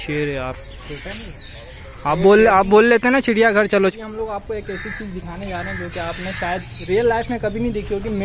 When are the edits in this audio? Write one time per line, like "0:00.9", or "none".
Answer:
0:03.7